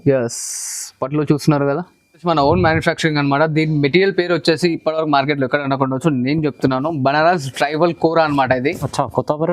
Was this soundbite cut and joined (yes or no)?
yes